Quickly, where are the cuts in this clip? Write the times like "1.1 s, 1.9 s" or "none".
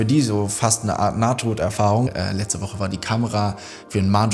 2.1 s